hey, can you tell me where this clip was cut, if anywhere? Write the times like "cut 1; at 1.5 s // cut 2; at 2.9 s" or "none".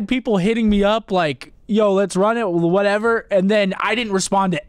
none